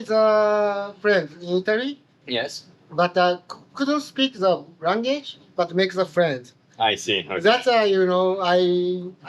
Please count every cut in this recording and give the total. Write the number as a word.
zero